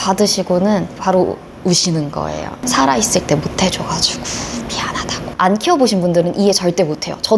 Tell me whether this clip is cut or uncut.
uncut